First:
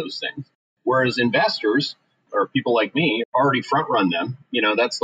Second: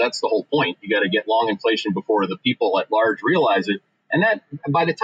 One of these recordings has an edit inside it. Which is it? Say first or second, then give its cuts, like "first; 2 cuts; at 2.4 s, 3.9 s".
first; 2 cuts; at 2.2 s, 3.3 s